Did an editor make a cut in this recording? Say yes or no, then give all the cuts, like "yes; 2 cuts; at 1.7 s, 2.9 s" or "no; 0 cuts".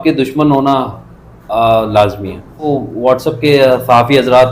yes; 1 cut; at 2.7 s